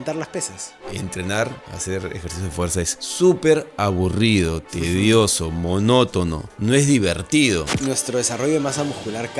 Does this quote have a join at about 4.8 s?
no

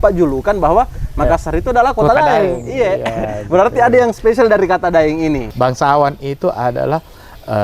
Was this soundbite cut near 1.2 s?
no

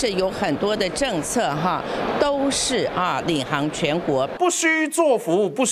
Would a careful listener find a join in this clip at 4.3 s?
yes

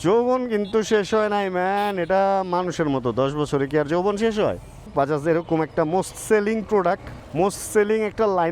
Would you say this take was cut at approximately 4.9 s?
yes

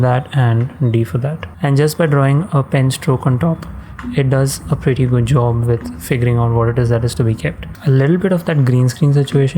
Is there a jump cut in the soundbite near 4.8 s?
no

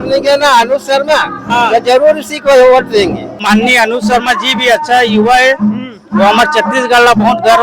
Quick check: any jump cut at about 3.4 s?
yes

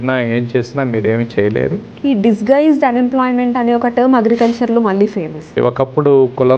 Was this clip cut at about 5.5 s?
yes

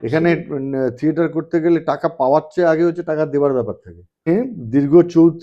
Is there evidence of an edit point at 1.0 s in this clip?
no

